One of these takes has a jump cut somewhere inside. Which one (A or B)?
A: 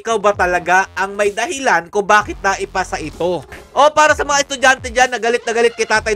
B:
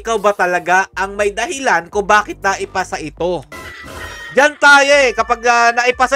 A